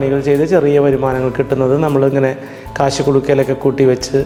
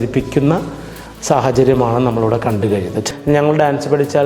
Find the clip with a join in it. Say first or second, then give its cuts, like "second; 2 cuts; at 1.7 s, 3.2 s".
second; 1 cut; at 3.0 s